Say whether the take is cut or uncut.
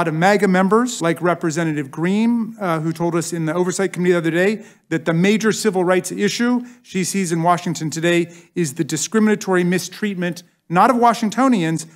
cut